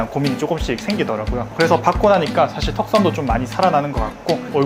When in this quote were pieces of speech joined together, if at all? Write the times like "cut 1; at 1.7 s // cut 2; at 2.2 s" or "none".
cut 1; at 1.5 s